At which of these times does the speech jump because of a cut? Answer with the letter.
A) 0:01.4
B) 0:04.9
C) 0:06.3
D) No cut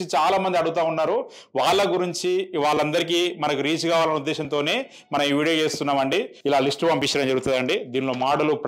C